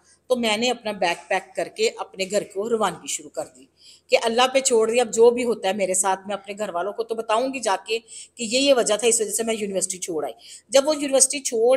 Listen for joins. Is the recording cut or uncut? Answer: uncut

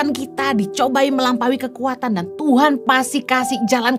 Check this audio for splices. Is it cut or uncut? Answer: uncut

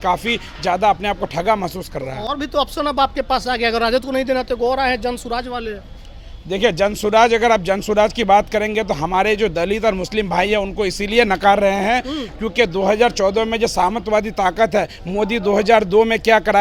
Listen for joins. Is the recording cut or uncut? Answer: uncut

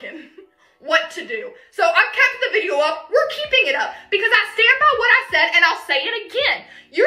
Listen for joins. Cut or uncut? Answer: cut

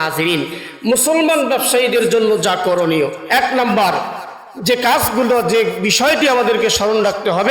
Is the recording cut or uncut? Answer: cut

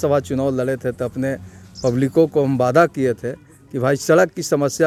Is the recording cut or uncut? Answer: uncut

